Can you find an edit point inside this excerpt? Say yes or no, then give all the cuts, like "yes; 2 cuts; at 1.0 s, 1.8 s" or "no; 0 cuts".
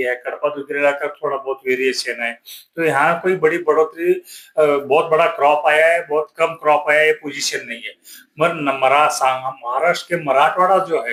no; 0 cuts